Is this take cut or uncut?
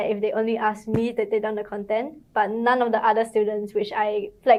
uncut